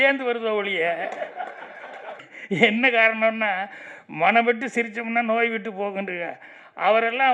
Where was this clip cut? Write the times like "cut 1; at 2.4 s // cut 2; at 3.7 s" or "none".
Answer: cut 1; at 2.3 s